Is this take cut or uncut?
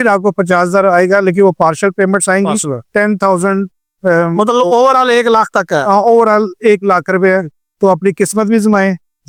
uncut